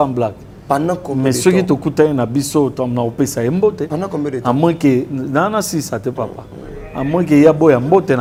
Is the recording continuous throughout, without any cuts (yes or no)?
yes